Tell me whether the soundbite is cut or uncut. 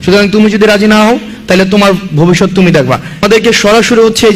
cut